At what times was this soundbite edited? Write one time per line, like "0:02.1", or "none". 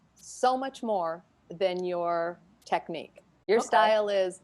0:03.3